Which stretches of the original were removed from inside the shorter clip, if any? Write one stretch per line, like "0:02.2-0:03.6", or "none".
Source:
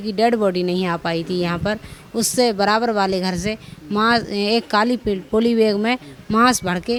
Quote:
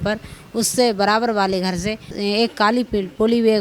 0:03.7-0:04.3